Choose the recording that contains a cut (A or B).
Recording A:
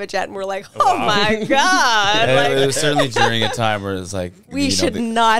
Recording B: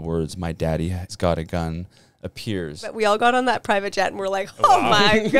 B